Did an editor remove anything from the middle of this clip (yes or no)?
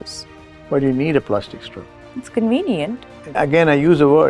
yes